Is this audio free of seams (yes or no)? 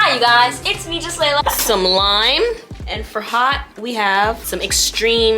no